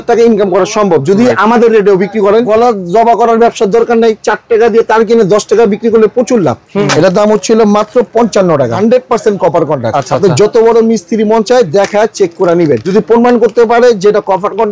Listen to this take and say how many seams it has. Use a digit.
4